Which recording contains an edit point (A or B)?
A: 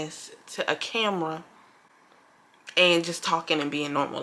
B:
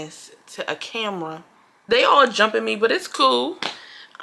B